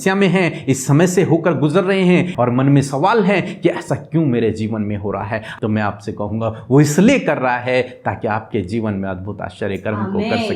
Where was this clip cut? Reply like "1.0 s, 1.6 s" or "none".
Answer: 2.3 s, 5.5 s